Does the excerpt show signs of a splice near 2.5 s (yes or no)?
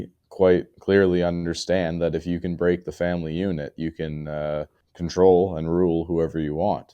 no